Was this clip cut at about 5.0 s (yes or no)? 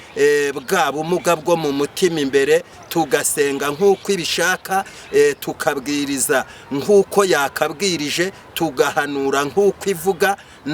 no